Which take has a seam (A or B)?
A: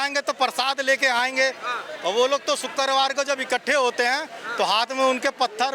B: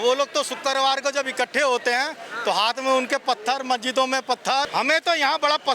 B